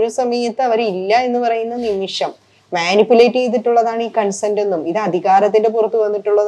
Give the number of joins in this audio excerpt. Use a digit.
0